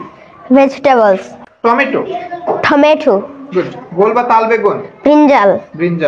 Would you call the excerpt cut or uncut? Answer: cut